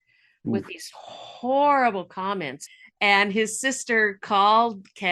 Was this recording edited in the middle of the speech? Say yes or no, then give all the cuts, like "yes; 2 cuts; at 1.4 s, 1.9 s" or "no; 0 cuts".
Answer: yes; 1 cut; at 2.7 s